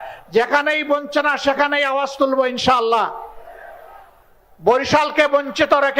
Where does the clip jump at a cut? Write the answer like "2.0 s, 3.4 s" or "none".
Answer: 4.1 s